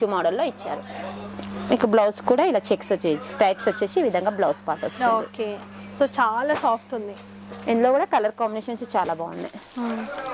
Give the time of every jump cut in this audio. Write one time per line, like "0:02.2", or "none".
none

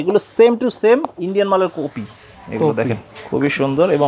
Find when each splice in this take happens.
none

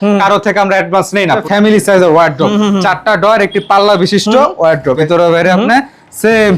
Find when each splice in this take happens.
0:01.4
0:05.0

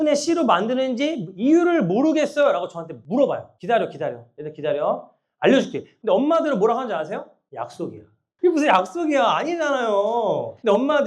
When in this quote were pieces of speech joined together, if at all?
0:05.9

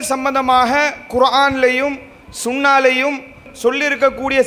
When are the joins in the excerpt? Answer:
none

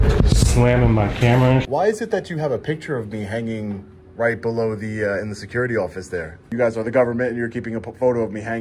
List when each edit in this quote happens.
0:01.7
0:06.5

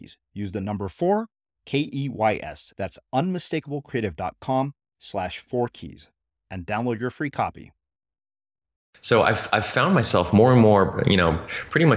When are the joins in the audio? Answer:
0:09.0

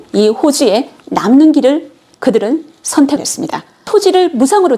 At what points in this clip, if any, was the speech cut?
0:03.7

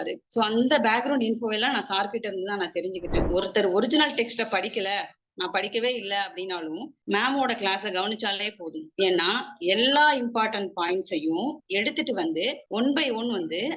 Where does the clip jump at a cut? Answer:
0:03.2

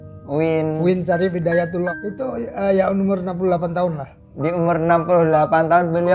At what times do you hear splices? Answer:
0:01.9

